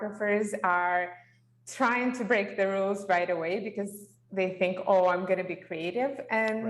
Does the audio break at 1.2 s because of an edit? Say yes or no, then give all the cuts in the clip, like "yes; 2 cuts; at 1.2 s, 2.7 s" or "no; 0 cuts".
no; 0 cuts